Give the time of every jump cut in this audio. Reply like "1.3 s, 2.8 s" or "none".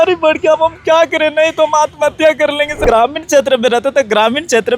2.7 s